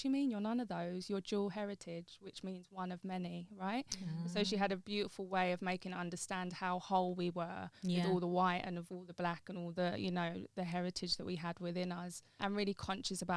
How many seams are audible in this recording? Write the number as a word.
one